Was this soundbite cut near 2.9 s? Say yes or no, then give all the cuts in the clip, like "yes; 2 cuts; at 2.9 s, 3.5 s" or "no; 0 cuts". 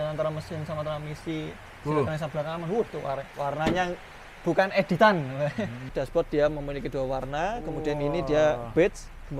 no; 1 cut; at 5.9 s